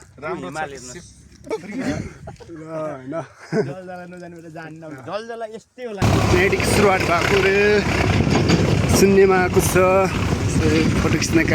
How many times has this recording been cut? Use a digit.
2